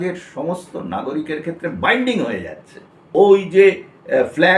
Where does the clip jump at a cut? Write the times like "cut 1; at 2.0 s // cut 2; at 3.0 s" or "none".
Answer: cut 1; at 2.9 s